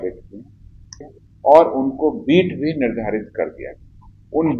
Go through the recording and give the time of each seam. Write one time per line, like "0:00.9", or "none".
0:01.0